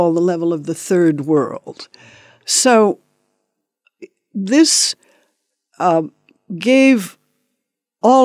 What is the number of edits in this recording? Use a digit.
1